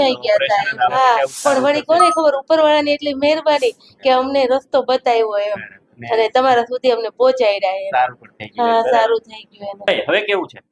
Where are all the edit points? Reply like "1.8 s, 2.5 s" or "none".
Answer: 0.9 s, 9.9 s